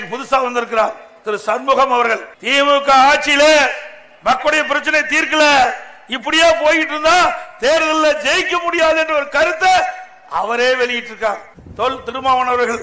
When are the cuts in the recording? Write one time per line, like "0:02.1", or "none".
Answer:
0:02.3
0:11.6